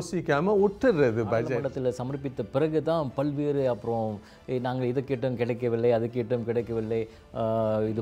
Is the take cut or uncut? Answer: cut